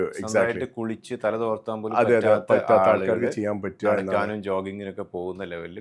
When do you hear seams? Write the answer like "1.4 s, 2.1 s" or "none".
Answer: none